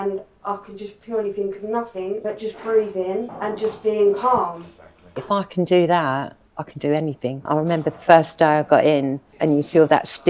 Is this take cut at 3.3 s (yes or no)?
yes